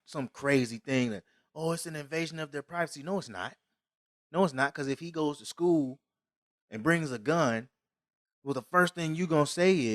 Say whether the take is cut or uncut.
uncut